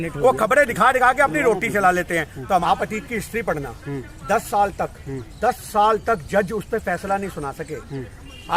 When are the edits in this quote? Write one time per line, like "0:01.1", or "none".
0:02.6